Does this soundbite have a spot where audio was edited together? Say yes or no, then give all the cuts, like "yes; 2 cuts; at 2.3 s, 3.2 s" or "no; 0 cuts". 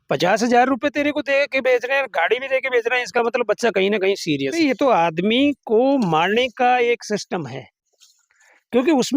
yes; 1 cut; at 4.5 s